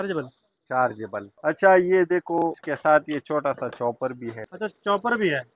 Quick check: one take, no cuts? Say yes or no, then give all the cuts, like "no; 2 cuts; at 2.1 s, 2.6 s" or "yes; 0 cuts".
no; 3 cuts; at 1.3 s, 2.6 s, 4.4 s